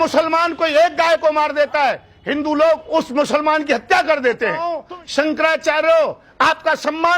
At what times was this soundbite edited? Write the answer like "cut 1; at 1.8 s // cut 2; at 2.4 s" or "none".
cut 1; at 4.7 s